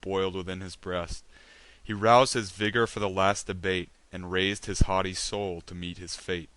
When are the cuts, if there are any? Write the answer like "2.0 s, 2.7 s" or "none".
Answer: 3.1 s